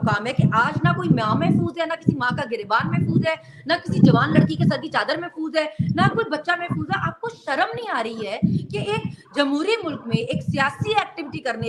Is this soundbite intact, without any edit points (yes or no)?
yes